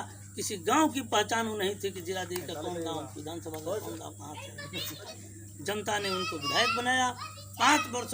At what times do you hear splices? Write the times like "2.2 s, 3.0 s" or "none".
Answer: 5.1 s